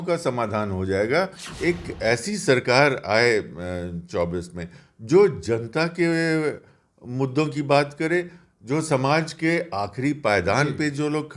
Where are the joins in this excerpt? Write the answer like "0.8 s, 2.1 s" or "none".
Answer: 1.4 s